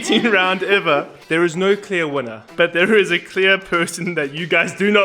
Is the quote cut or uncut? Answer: cut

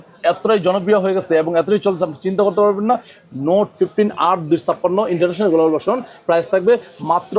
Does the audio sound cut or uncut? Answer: uncut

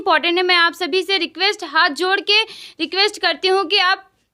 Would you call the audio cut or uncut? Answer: uncut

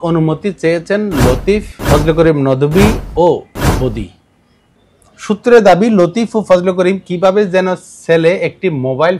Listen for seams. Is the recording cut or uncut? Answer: cut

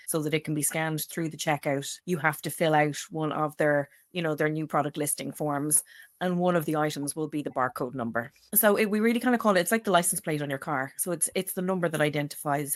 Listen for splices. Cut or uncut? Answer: uncut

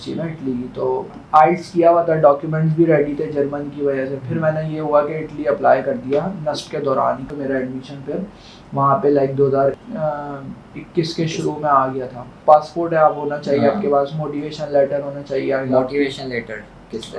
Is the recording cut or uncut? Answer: cut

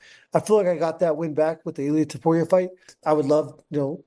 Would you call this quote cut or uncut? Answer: cut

